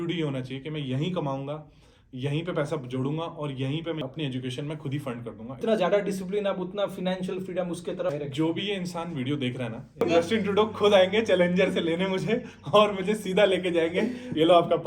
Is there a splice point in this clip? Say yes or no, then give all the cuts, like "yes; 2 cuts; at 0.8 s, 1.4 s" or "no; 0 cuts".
yes; 4 cuts; at 4.0 s, 5.5 s, 8.1 s, 10.0 s